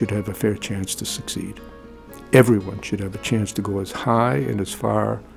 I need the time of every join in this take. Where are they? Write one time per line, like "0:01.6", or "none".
none